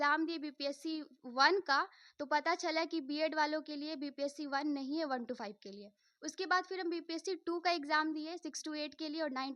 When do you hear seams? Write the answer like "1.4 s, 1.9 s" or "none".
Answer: none